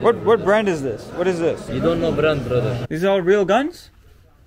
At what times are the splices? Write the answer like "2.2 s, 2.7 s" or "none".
1.7 s, 2.8 s